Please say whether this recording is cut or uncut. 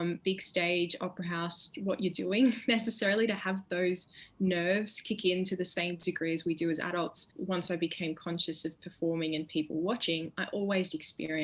cut